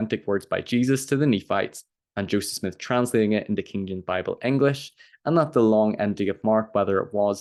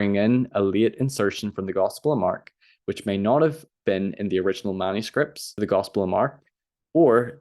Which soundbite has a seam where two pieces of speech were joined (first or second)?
second